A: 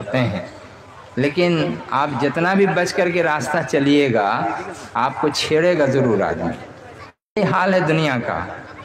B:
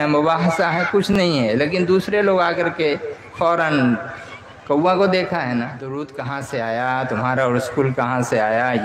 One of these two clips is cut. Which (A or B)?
B